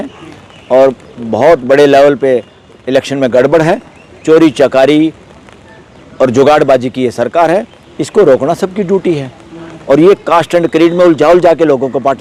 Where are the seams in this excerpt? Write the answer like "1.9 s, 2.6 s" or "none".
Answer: none